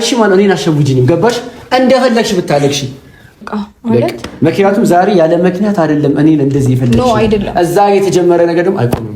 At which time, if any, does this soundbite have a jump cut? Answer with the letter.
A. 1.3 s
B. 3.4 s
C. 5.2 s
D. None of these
B